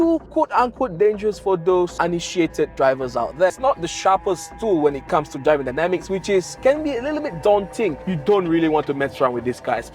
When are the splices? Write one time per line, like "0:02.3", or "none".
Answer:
0:03.5
0:08.0